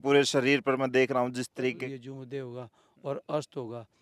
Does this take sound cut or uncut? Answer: cut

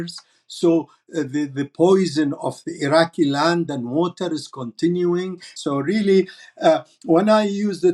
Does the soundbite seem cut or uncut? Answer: cut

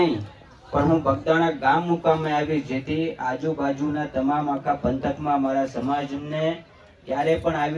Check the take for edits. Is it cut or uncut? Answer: uncut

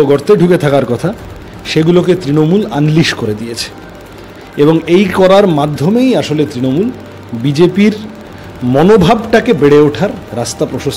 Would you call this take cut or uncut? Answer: uncut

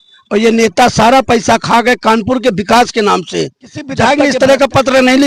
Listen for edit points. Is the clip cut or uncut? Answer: cut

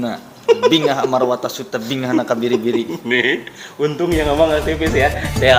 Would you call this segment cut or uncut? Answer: uncut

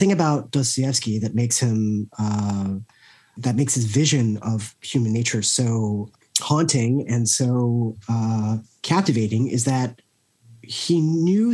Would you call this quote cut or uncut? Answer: cut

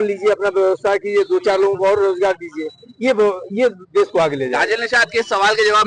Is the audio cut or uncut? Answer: uncut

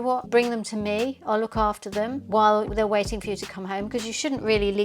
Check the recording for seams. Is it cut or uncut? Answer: cut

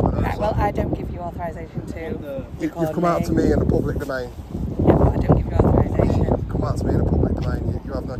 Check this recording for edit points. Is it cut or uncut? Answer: uncut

